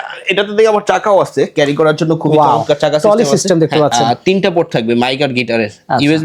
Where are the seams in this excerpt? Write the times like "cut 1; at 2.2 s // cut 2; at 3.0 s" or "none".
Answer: cut 1; at 3.9 s